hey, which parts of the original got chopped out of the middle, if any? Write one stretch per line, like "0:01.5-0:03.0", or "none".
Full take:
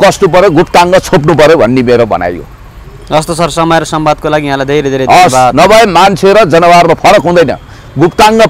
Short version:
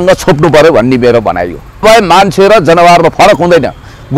0:02.7-0:05.7